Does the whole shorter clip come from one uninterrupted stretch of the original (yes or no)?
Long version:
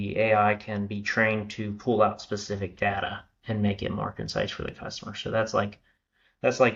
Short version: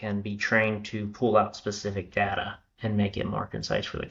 yes